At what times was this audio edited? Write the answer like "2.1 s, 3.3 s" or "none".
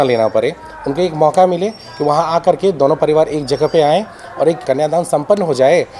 4.6 s